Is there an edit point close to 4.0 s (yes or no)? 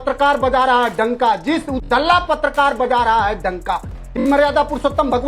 yes